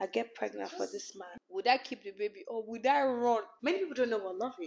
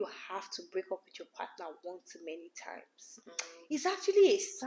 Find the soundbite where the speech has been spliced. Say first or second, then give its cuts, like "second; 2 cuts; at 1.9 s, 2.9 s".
first; 2 cuts; at 1.3 s, 3.5 s